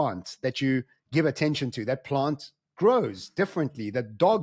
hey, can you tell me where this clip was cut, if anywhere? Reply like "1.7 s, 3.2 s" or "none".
none